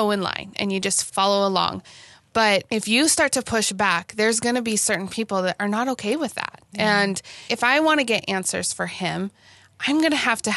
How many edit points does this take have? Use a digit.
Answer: 3